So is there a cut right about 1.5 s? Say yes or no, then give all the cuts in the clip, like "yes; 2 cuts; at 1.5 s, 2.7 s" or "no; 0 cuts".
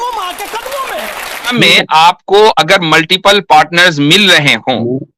yes; 1 cut; at 1.5 s